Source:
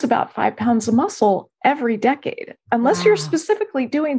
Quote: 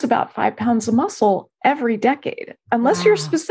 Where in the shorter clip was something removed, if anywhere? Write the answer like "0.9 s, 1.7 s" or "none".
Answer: none